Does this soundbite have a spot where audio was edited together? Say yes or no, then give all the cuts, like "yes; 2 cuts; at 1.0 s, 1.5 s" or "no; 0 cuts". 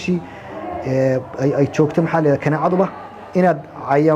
no; 0 cuts